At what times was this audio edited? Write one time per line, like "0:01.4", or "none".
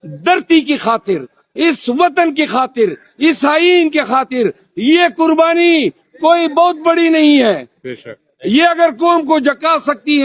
none

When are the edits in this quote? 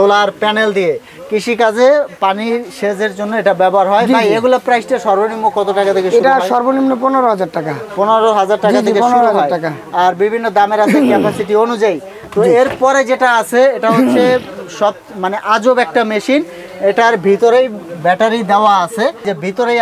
none

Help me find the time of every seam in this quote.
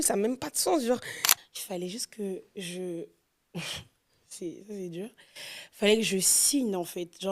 0:01.2

